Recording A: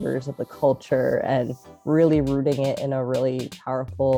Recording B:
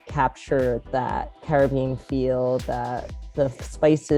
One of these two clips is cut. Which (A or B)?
B